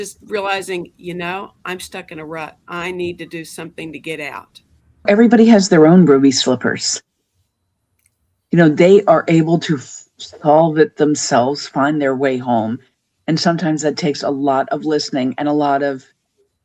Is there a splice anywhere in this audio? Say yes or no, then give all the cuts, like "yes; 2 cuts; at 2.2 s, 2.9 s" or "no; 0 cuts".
yes; 1 cut; at 5.0 s